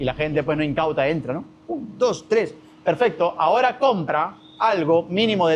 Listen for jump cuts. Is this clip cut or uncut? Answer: uncut